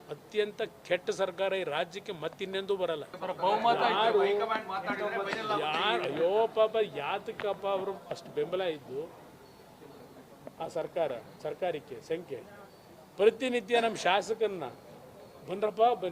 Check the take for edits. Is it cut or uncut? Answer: cut